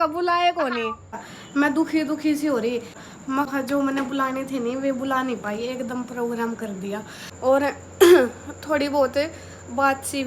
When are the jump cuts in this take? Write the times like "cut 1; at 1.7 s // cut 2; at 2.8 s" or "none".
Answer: cut 1; at 1.3 s // cut 2; at 3.1 s // cut 3; at 7.2 s

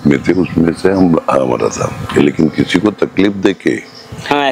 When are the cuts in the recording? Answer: none

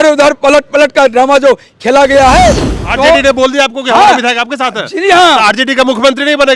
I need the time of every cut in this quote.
cut 1; at 2.7 s

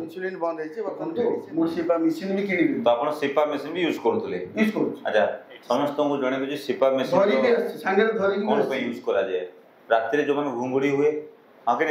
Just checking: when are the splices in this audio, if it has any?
cut 1; at 0.9 s

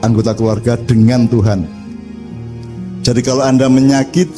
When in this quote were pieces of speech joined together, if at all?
none

